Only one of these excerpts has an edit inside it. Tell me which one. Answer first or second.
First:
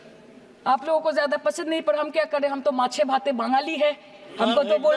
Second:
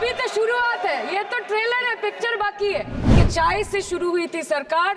second